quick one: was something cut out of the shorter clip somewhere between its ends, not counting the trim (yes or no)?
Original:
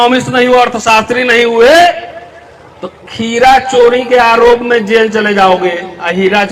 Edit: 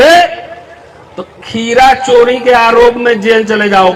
no